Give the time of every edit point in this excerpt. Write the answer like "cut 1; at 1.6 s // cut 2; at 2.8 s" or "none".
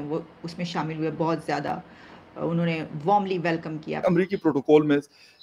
cut 1; at 3.9 s